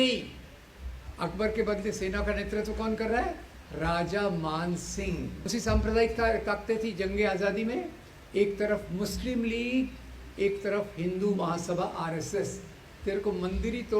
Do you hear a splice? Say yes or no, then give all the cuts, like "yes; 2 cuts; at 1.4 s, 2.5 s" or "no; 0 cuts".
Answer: yes; 2 cuts; at 5.5 s, 12.7 s